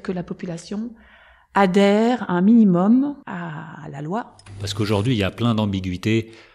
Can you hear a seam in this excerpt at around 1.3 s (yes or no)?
no